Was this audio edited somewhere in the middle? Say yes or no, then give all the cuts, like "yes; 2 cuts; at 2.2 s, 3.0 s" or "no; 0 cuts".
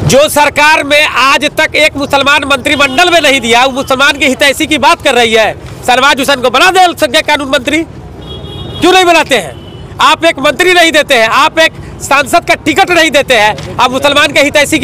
no; 0 cuts